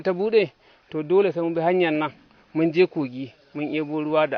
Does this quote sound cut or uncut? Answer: uncut